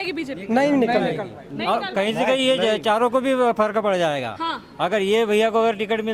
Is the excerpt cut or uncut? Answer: uncut